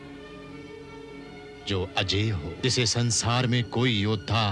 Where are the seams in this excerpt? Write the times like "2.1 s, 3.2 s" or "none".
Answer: 2.6 s